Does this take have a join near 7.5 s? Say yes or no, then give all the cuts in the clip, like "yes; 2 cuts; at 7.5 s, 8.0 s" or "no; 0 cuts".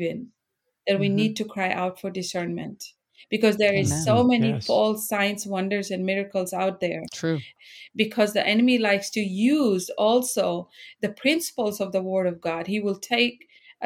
yes; 1 cut; at 7.5 s